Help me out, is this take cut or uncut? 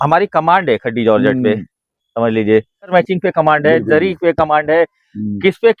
cut